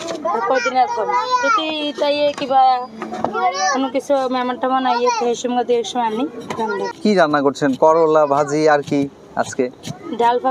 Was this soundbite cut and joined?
yes; 1 cut; at 6.9 s

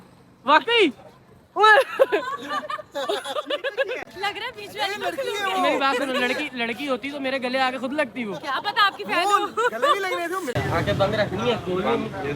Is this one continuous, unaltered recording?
no; 2 cuts; at 4.1 s, 10.5 s

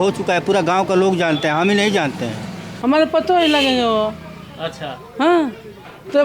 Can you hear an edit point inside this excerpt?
yes; 1 cut; at 2.7 s

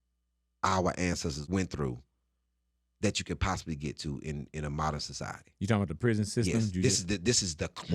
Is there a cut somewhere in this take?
yes; 1 cut; at 1.4 s

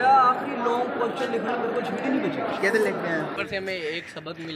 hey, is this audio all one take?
no; 1 cut; at 3.4 s

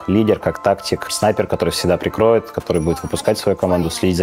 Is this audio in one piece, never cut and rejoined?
no; 1 cut; at 1.1 s

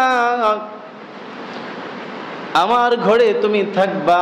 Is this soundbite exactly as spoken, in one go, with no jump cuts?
yes; 0 cuts

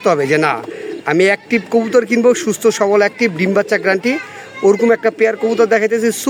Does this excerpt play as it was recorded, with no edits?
yes; 0 cuts

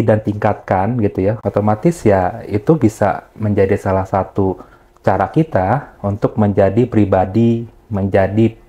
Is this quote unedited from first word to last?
yes; 0 cuts

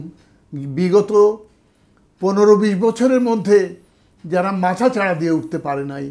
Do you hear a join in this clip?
no; 0 cuts

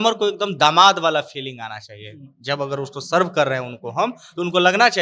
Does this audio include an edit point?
no; 0 cuts

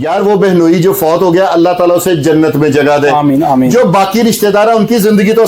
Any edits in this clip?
no; 0 cuts

